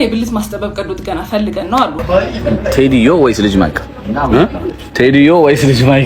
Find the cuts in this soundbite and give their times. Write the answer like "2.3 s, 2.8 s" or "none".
2.0 s